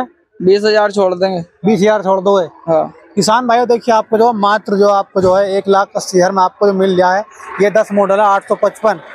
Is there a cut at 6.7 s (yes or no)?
no